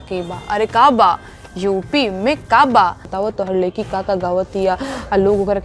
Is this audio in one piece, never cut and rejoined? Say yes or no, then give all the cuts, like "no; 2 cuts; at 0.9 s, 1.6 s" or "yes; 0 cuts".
no; 1 cut; at 3.1 s